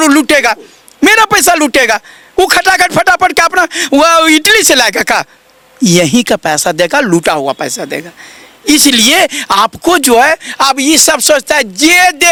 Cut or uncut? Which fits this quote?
uncut